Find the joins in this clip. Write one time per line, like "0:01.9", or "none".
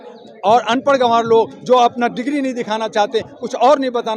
none